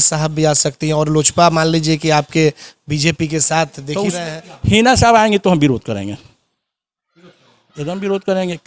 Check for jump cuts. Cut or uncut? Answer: cut